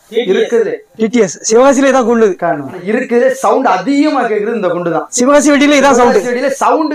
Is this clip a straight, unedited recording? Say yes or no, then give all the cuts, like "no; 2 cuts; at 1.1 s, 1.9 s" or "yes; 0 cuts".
yes; 0 cuts